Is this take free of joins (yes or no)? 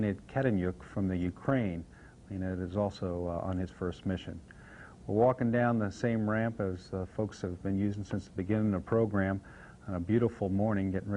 no